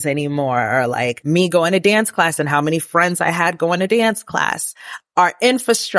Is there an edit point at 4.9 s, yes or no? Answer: yes